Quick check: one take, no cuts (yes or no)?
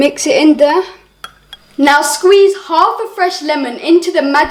yes